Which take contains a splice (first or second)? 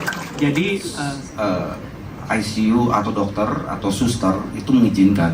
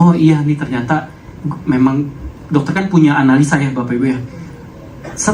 first